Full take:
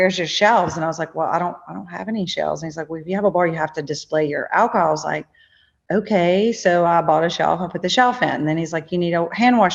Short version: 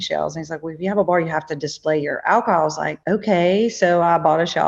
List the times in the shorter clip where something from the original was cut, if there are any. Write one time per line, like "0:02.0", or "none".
0:02.9